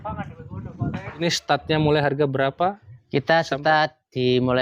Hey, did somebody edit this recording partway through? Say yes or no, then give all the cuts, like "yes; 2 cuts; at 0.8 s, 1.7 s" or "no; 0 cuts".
yes; 1 cut; at 1.2 s